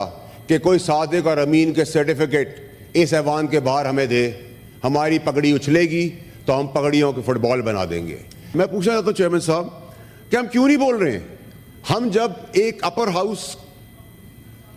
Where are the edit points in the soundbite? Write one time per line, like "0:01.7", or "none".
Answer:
0:08.5